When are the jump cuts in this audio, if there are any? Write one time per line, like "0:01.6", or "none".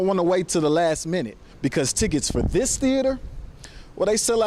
none